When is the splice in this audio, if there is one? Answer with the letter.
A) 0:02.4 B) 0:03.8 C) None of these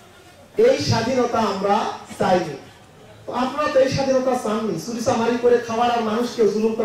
C